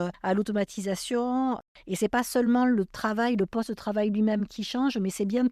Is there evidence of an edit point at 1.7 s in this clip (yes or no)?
no